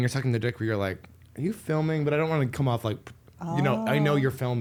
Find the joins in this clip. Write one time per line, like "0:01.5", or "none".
none